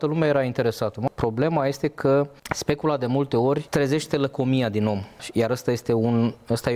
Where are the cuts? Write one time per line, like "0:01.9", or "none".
0:01.0
0:02.4
0:03.6
0:05.2